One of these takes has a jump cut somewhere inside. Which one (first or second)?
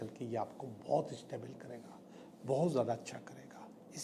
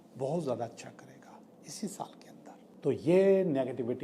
second